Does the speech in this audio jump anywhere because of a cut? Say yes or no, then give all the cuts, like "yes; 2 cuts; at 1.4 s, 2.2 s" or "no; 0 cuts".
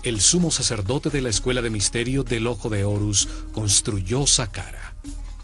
no; 0 cuts